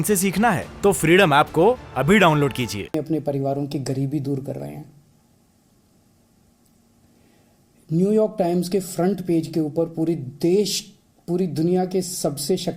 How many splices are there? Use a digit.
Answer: 1